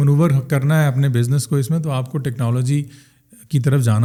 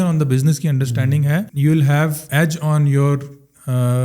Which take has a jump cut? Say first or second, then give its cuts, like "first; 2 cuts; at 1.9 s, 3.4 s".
second; 2 cuts; at 1.5 s, 2.3 s